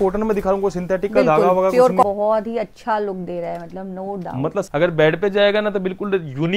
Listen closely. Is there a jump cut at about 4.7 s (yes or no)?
yes